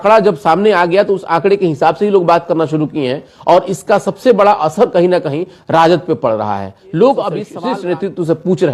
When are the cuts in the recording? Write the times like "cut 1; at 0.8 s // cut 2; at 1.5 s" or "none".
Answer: cut 1; at 7.5 s